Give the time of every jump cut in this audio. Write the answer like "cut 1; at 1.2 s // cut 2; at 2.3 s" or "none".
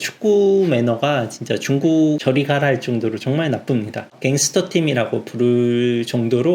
cut 1; at 4.1 s